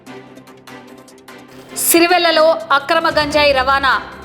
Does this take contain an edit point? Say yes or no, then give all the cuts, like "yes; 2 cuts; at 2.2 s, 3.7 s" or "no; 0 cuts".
yes; 1 cut; at 1.2 s